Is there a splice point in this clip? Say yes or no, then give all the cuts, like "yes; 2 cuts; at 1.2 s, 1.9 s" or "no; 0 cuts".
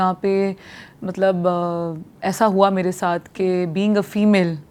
no; 0 cuts